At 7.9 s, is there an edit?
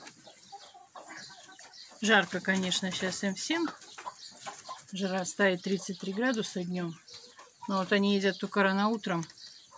no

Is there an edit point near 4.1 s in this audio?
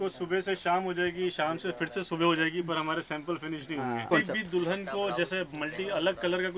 yes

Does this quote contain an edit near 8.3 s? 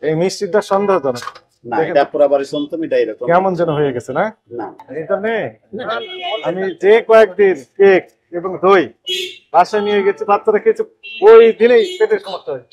no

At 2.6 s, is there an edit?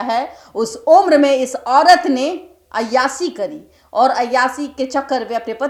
no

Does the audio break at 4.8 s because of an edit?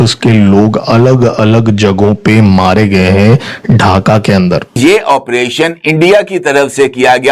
yes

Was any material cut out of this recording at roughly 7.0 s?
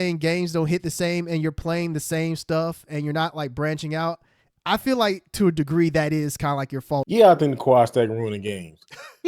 yes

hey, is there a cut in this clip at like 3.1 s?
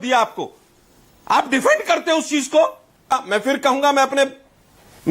yes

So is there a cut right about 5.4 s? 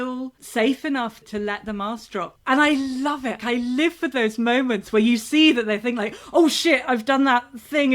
no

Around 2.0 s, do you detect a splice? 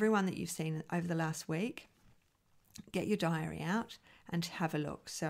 no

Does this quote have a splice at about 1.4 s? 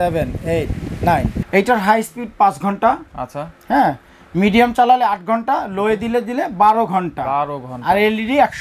yes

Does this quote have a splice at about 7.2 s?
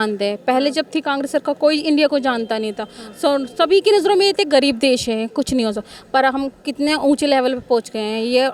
no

